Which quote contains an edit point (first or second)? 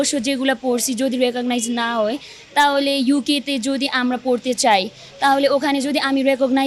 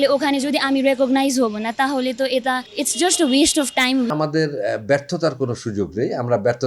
second